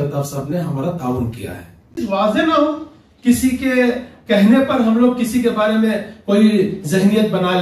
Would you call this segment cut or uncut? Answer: cut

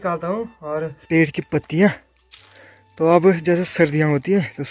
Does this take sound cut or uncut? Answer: cut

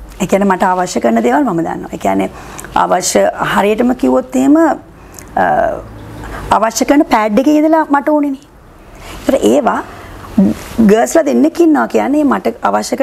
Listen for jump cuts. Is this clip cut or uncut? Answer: uncut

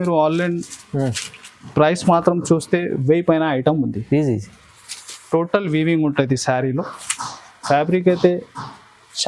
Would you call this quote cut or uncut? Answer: uncut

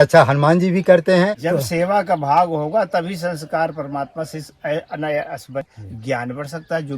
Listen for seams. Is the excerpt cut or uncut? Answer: cut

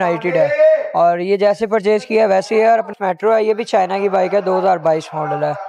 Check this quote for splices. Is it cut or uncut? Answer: cut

